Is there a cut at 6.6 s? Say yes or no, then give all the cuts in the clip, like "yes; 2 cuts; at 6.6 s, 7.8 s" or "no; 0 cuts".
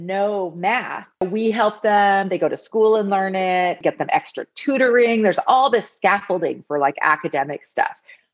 no; 2 cuts; at 1.2 s, 3.8 s